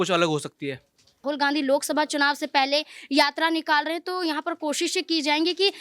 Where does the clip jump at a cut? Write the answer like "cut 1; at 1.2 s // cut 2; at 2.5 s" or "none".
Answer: cut 1; at 1.1 s